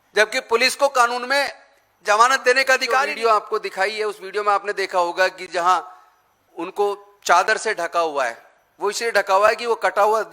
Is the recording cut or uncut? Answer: cut